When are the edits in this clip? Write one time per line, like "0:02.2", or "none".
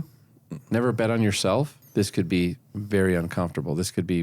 0:01.8